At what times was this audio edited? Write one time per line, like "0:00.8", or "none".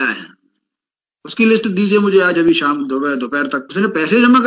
none

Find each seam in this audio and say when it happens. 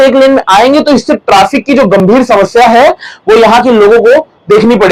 none

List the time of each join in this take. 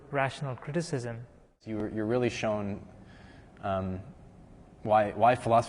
0:01.9

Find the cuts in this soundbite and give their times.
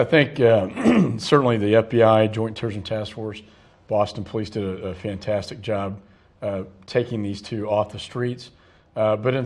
none

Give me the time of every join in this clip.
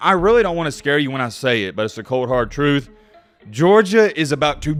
none

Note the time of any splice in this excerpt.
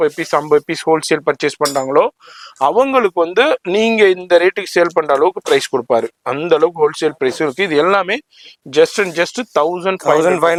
none

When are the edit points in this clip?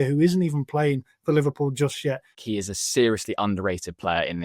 0:02.4

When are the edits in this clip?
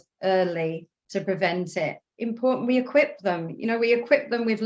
0:02.1

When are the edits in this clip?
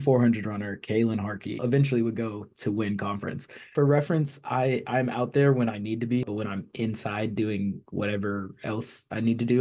0:01.6
0:03.6
0:06.3

